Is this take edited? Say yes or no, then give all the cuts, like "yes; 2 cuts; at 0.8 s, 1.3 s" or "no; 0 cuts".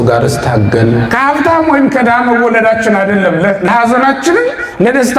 yes; 1 cut; at 1.1 s